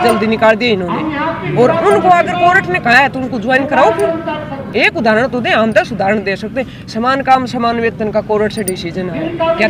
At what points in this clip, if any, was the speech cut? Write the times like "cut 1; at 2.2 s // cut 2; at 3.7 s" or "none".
none